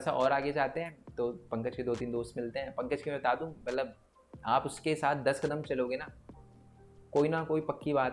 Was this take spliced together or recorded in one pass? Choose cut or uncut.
uncut